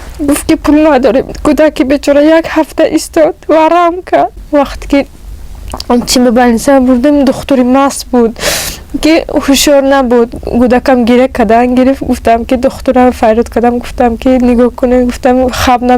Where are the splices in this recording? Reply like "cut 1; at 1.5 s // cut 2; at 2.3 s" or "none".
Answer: cut 1; at 4.4 s